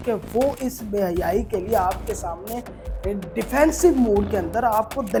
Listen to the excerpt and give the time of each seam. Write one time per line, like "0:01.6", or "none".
none